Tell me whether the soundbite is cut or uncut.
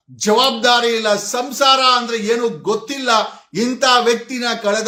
uncut